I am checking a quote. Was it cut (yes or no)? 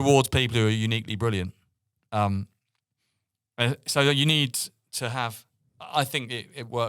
no